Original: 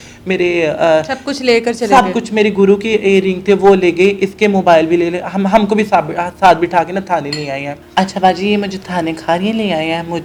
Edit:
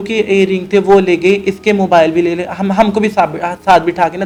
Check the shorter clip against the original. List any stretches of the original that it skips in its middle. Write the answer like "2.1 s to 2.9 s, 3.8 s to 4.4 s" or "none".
none